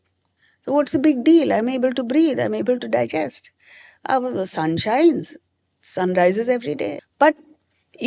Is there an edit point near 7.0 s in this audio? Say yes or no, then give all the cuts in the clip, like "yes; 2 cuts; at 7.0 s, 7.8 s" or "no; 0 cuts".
yes; 1 cut; at 7.0 s